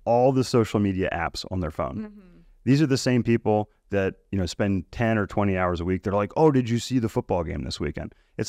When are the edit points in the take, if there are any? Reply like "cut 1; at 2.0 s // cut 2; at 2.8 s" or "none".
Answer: none